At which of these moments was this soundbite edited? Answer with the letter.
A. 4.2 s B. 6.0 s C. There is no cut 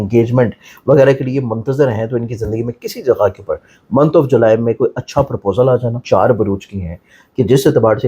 B